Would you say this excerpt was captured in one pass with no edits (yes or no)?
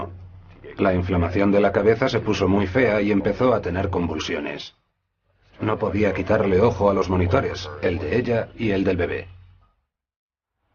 no